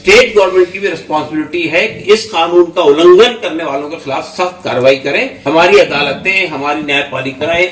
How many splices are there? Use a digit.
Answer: 1